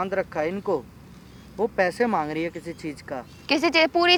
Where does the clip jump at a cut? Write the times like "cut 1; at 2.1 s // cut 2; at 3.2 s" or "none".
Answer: none